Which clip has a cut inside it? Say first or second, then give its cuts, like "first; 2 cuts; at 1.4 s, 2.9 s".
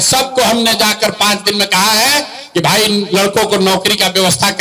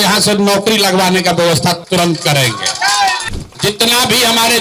second; 1 cut; at 3.2 s